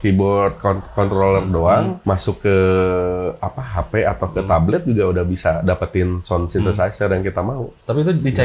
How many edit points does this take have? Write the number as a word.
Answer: one